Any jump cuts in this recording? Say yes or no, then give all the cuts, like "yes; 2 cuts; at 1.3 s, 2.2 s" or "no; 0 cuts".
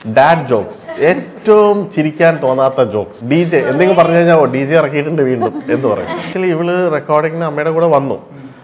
yes; 2 cuts; at 3.1 s, 6.3 s